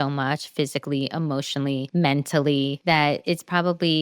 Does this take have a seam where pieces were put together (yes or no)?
yes